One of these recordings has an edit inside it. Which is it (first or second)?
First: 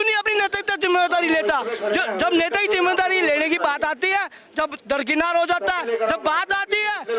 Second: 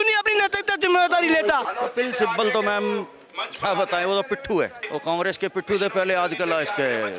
second